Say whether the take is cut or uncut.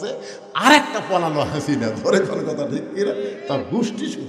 uncut